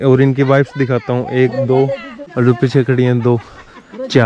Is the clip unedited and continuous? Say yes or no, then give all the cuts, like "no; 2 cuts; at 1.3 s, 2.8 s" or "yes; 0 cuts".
no; 1 cut; at 2.2 s